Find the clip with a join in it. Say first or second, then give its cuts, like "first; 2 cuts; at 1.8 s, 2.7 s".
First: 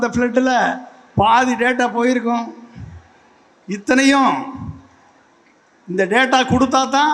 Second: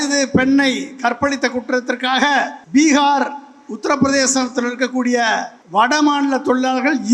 second; 2 cuts; at 2.6 s, 5.6 s